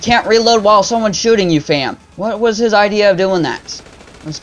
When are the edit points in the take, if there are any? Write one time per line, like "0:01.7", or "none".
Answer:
none